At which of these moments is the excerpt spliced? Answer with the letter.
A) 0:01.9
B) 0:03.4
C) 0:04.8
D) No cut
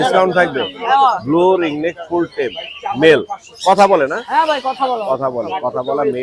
D